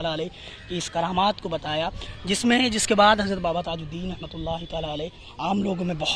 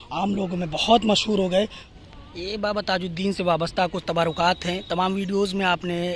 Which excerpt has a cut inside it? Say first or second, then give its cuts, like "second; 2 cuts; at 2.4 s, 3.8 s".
second; 1 cut; at 1.8 s